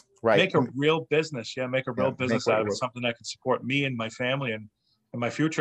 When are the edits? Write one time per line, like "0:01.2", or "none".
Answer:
none